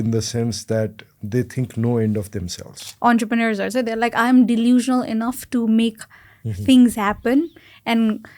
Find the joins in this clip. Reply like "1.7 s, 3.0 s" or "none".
2.8 s